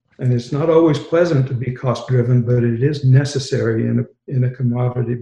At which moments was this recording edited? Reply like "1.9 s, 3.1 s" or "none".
4.2 s